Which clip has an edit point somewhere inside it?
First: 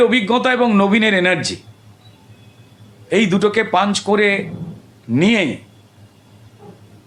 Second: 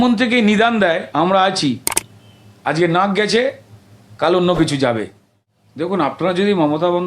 second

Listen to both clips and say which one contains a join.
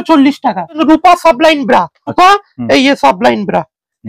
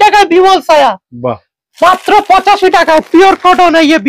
first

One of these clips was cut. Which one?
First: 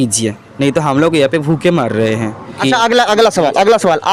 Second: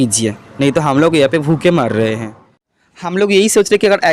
second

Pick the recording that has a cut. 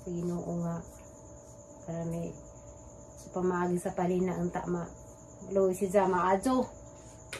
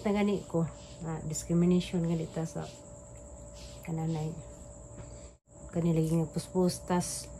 second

